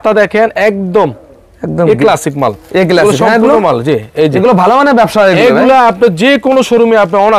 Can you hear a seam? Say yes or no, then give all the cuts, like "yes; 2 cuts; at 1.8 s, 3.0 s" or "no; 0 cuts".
no; 0 cuts